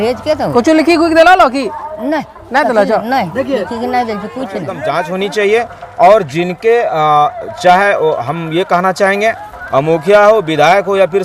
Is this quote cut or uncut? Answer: cut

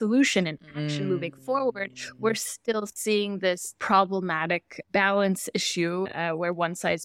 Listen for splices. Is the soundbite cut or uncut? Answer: cut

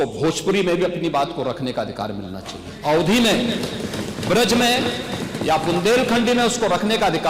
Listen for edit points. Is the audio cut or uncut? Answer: uncut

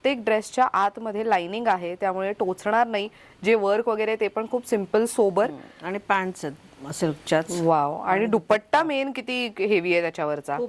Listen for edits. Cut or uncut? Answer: uncut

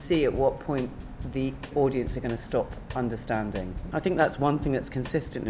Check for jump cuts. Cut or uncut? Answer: cut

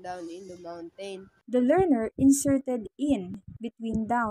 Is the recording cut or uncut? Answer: uncut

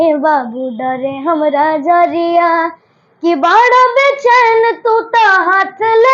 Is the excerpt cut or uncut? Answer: uncut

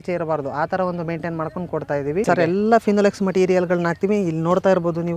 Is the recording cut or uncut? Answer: cut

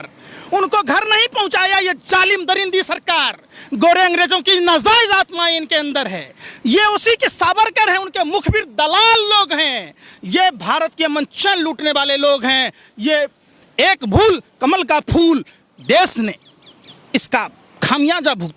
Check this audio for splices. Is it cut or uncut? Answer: uncut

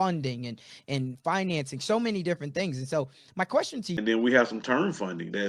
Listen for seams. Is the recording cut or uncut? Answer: cut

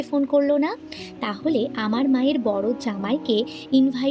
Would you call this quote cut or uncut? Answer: uncut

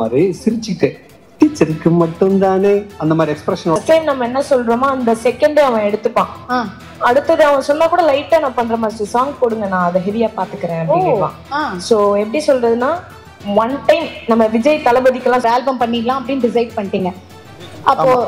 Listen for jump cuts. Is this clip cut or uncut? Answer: cut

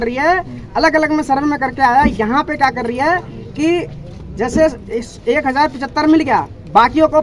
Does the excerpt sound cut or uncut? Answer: uncut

